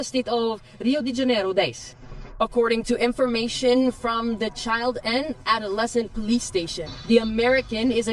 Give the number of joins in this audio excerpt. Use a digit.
1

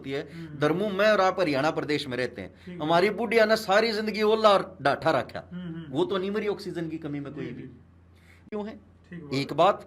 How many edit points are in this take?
1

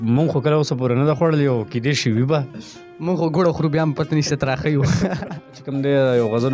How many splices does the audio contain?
1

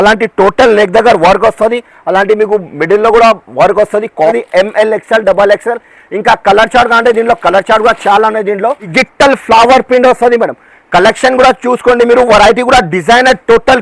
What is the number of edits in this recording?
2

